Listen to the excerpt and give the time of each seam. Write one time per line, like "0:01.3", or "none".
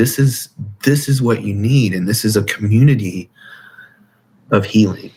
none